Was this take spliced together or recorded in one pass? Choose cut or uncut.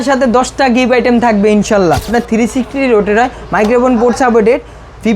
cut